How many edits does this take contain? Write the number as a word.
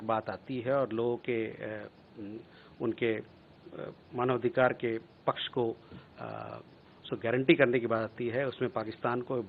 zero